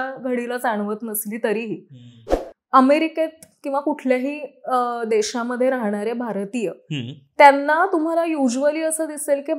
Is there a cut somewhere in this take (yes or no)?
yes